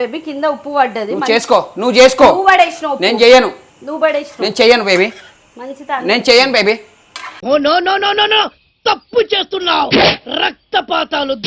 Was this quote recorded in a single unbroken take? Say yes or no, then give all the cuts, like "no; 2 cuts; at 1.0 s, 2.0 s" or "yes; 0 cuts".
yes; 0 cuts